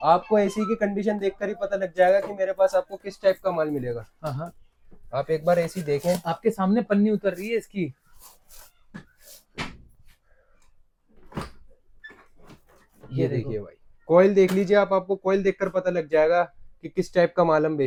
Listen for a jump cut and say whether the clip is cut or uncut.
uncut